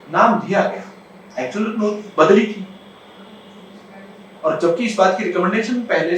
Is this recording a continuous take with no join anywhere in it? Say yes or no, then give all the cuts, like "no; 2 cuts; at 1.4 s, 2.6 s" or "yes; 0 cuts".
yes; 0 cuts